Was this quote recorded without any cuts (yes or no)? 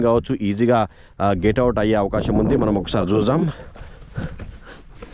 yes